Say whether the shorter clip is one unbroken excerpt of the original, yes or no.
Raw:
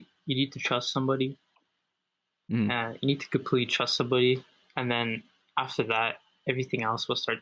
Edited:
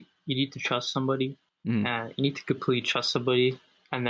no